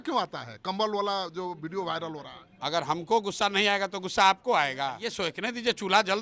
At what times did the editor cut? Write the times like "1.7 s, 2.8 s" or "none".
5.0 s